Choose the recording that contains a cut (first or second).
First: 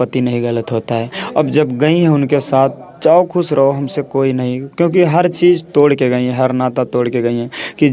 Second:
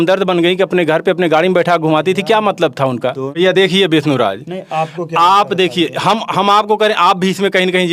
second